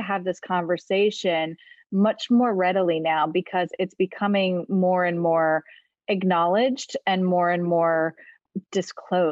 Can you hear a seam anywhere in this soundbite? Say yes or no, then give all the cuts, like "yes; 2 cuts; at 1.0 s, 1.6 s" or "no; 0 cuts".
yes; 1 cut; at 8.4 s